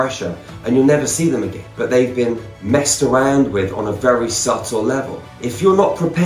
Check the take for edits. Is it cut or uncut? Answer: cut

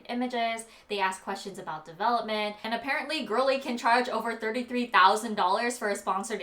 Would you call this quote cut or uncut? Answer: cut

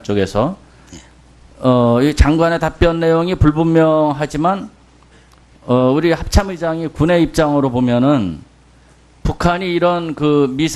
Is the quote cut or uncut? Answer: cut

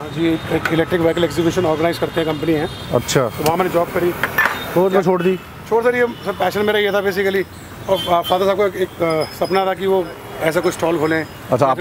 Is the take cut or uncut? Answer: uncut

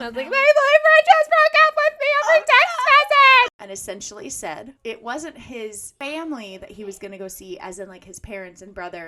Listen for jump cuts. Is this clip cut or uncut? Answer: cut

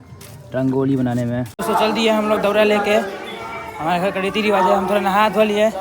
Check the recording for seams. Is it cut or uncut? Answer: cut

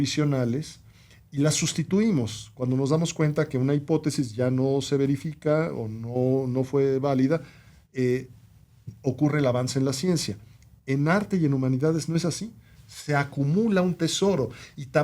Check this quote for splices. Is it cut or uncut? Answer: uncut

